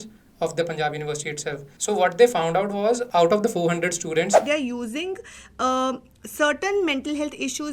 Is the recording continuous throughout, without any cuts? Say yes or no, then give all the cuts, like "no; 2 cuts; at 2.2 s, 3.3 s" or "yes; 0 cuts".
no; 3 cuts; at 1.7 s, 3.0 s, 4.4 s